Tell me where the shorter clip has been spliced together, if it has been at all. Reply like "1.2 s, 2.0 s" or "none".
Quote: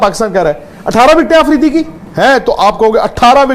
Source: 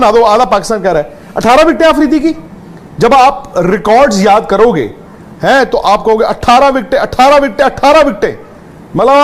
2.0 s